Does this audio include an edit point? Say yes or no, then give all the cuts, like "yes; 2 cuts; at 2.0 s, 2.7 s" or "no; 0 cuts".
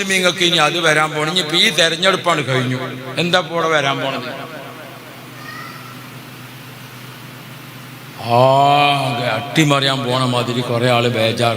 no; 0 cuts